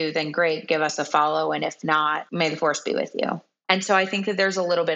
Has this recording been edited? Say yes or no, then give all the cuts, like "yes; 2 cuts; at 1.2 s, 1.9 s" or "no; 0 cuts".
yes; 2 cuts; at 2.3 s, 3.5 s